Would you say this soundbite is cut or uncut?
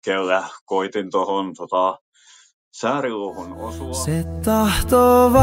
cut